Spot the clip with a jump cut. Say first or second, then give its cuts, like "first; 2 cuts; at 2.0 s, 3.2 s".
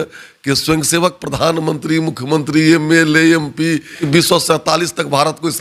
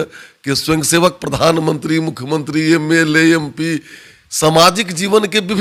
first; 1 cut; at 4.0 s